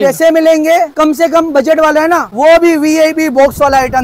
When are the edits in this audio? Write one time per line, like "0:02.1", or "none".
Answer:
0:00.9
0:02.3